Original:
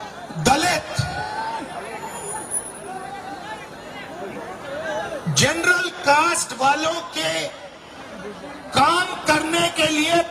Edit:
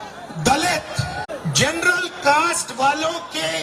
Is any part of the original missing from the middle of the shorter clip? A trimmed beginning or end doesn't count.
yes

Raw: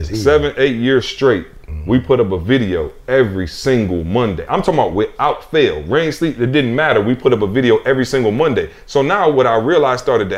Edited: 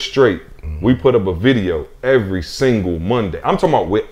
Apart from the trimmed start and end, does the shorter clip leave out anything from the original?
no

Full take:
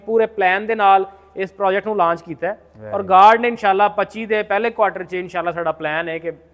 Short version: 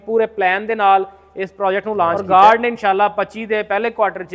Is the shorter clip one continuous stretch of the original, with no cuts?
no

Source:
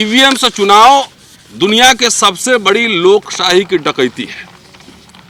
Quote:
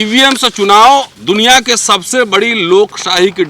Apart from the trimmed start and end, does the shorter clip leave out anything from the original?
yes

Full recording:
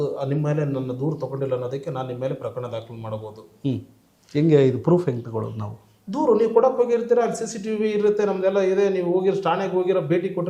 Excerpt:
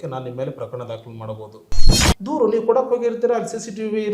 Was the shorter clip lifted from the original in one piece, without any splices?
no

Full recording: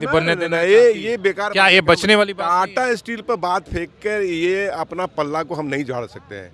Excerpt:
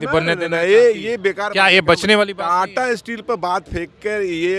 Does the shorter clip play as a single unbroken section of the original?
yes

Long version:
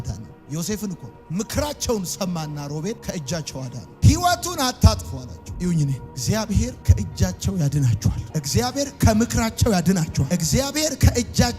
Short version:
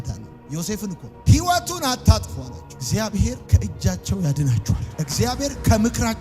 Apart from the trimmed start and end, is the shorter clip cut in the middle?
yes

